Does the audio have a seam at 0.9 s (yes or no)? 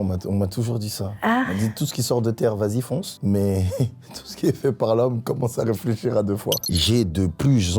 no